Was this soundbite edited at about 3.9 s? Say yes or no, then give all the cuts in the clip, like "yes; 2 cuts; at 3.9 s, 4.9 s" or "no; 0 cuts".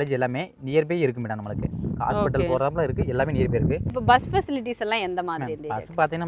yes; 1 cut; at 3.9 s